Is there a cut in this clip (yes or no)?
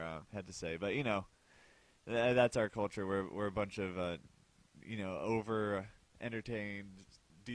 yes